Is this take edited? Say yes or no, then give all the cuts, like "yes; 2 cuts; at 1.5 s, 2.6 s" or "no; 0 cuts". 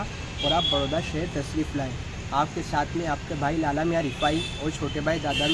no; 0 cuts